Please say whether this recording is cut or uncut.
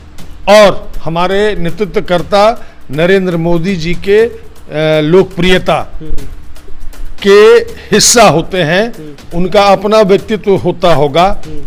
uncut